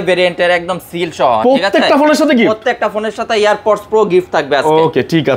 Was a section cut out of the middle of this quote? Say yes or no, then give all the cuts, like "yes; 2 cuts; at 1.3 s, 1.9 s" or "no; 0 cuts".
no; 0 cuts